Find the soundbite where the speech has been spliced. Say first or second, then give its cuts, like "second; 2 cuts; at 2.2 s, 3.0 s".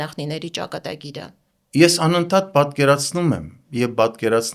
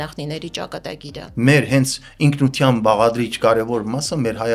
second; 1 cut; at 1.2 s